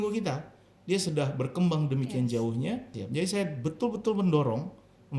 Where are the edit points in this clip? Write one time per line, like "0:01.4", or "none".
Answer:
0:03.0